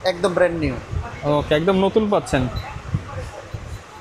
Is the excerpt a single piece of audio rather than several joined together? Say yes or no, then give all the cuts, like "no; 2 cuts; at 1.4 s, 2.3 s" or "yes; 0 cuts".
yes; 0 cuts